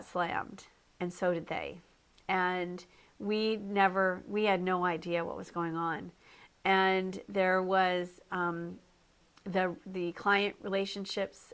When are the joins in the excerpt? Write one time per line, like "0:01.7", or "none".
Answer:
0:04.2

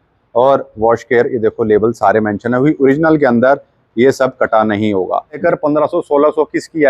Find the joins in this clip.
0:05.4

